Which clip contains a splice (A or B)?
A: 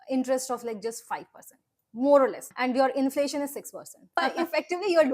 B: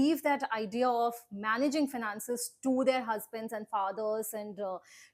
A